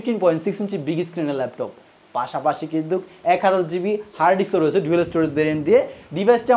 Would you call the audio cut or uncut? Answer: uncut